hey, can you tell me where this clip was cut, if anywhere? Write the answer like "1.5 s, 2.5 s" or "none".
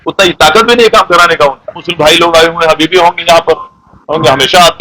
1.8 s